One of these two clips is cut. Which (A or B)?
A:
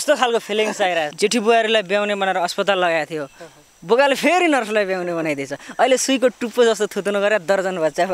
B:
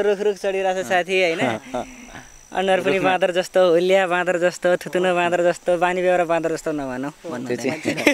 A